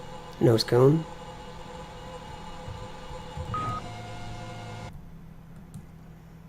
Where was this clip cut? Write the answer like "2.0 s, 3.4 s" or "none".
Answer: none